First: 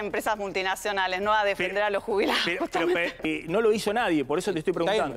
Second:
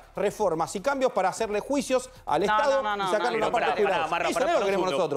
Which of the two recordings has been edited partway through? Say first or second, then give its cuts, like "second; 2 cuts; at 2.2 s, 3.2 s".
first; 1 cut; at 3.2 s